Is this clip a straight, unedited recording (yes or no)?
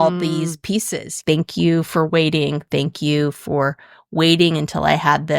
no